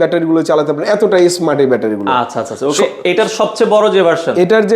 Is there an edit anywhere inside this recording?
no; 0 cuts

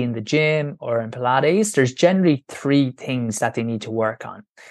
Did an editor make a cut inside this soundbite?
no; 0 cuts

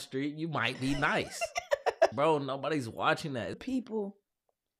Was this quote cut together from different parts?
yes; 2 cuts; at 2.1 s, 3.6 s

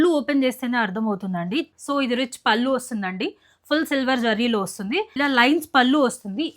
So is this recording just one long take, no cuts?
no; 2 cuts; at 1.7 s, 5.1 s

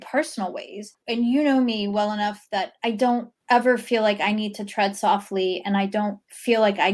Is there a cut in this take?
yes; 2 cuts; at 0.9 s, 3.0 s

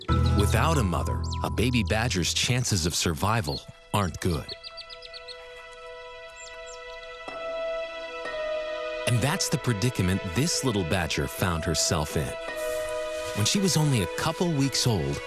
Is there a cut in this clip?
no; 0 cuts

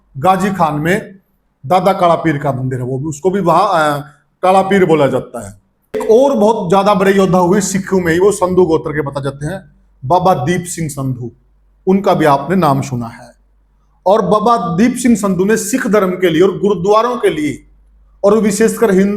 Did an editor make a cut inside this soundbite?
yes; 1 cut; at 6.0 s

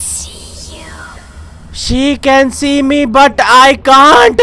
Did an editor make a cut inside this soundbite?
no; 0 cuts

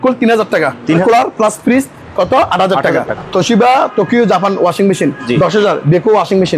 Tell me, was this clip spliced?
yes; 2 cuts; at 1.0 s, 3.1 s

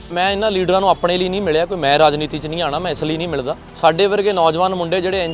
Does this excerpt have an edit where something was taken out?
yes; 1 cut; at 3.6 s

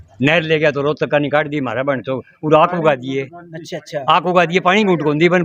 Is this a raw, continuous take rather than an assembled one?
yes; 0 cuts

